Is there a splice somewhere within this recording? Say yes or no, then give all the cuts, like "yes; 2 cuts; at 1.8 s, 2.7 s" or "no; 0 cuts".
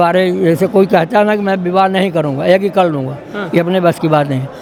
no; 0 cuts